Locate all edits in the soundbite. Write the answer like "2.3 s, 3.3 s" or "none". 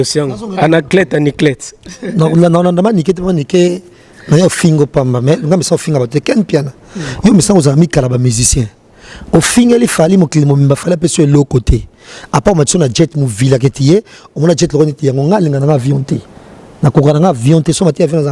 none